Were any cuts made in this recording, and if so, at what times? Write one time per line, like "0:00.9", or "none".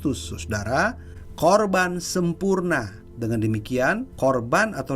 0:03.1
0:04.1

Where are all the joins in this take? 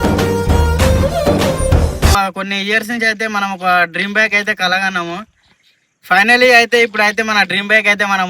0:02.1

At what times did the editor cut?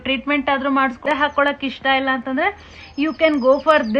0:01.0

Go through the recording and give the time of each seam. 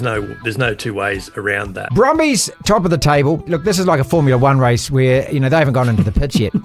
0:01.8
0:02.5
0:03.4

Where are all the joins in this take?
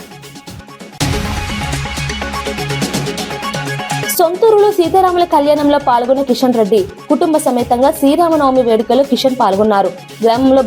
none

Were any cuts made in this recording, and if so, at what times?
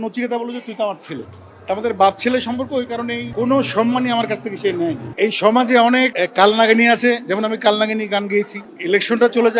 0:03.3
0:05.1
0:06.2
0:08.6

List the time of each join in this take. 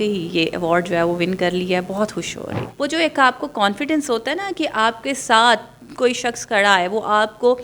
0:02.6

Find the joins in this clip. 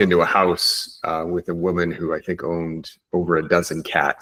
none

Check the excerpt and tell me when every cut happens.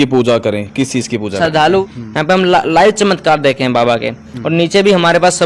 0:01.8

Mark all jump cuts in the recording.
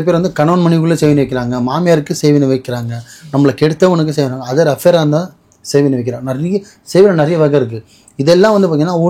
none

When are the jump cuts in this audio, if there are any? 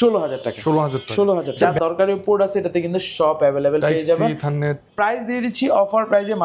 0:01.6
0:04.8

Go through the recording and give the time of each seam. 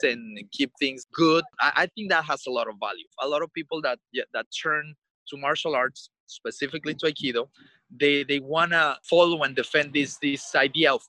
0:01.0
0:01.6
0:03.0
0:09.0

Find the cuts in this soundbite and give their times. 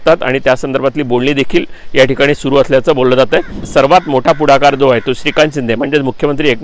0:03.6

